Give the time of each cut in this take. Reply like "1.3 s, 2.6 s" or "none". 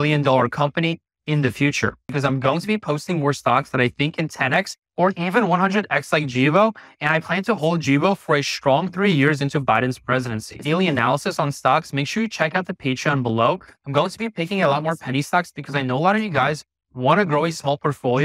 2.1 s, 10.6 s